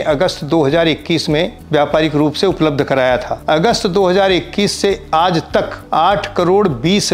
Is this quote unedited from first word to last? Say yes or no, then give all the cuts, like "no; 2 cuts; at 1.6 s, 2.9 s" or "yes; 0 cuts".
no; 3 cuts; at 1.6 s, 3.3 s, 5.8 s